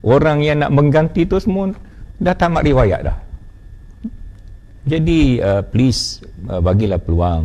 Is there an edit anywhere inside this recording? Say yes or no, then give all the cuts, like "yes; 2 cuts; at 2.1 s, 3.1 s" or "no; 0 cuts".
no; 0 cuts